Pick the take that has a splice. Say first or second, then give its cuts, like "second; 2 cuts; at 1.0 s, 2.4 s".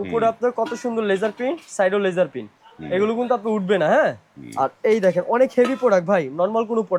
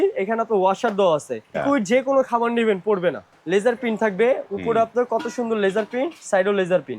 second; 2 cuts; at 1.6 s, 3.3 s